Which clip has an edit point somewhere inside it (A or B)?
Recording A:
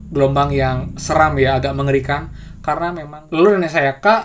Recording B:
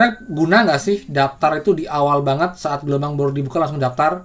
A